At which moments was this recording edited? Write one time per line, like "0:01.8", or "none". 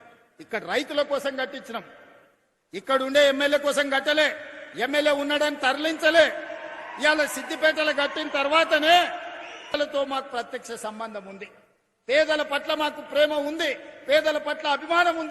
0:09.7